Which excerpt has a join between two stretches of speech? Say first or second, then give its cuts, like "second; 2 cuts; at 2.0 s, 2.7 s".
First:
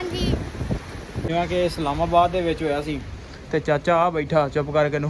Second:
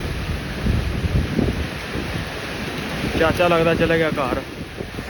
first; 1 cut; at 1.3 s